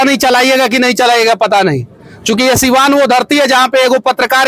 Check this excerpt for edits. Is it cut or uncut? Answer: uncut